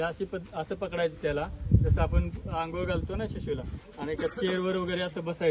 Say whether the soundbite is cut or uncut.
uncut